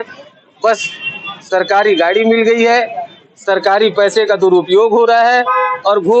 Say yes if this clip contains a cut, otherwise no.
no